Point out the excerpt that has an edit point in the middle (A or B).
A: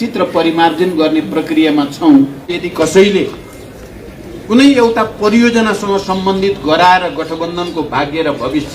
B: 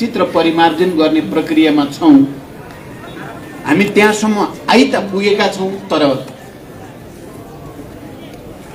A